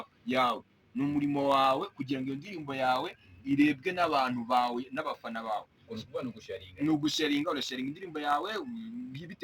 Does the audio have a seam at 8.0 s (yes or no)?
yes